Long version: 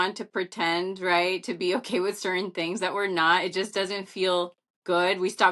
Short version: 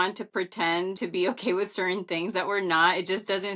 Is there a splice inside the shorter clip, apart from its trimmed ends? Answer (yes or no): yes